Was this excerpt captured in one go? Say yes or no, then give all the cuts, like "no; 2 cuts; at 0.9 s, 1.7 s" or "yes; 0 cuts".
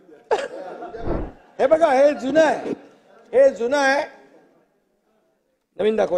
no; 1 cut; at 1.1 s